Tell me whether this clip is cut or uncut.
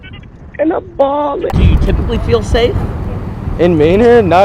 cut